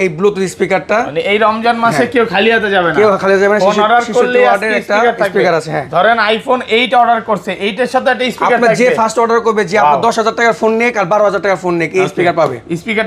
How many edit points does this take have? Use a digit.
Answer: 0